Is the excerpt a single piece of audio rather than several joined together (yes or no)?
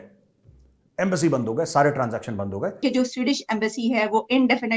no